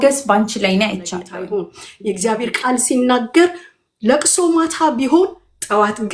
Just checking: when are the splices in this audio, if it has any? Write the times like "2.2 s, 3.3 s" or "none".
1.4 s

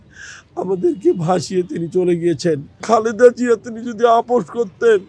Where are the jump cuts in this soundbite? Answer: 2.7 s

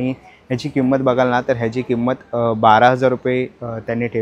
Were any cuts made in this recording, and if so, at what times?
none

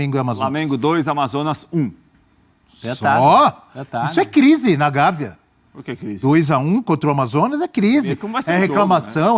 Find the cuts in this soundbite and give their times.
none

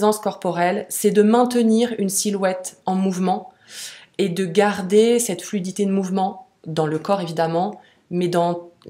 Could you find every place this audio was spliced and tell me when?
none

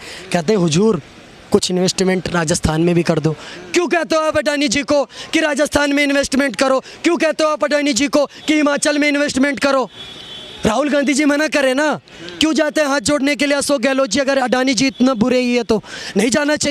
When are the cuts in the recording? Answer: none

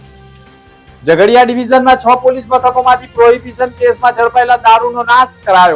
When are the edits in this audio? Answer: none

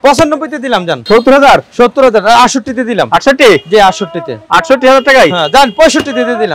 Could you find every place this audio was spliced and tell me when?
1.0 s

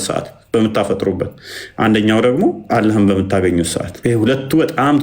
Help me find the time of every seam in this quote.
2.6 s, 3.9 s

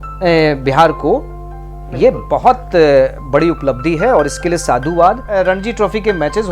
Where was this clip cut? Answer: 5.3 s

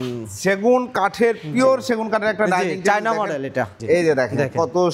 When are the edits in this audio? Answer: 3.8 s

